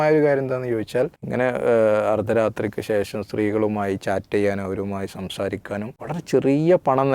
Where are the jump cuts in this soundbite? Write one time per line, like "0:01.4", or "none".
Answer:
0:01.2
0:06.0